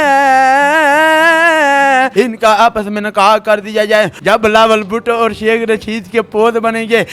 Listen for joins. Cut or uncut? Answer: cut